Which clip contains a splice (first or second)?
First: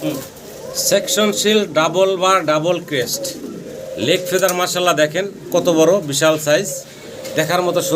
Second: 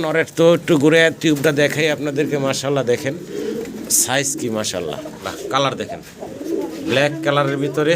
second